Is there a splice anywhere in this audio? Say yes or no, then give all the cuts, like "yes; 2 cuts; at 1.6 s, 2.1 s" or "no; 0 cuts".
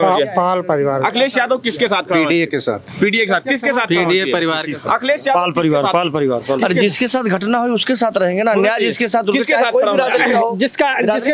no; 0 cuts